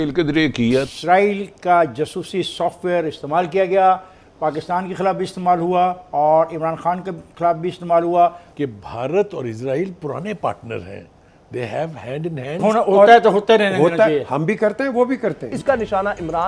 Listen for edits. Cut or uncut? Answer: cut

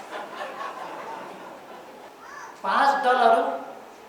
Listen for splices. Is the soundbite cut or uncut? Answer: cut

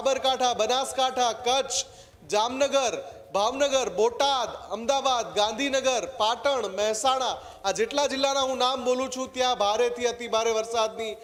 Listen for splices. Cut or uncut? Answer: uncut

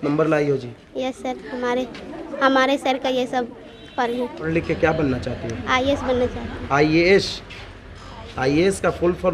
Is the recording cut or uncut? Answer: cut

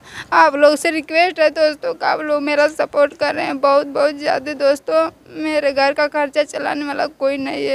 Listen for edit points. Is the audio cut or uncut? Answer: uncut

